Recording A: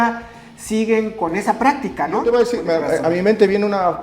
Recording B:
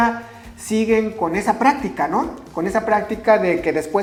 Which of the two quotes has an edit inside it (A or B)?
A